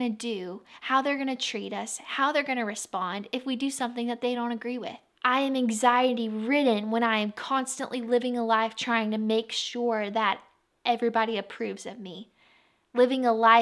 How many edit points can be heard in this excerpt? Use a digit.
1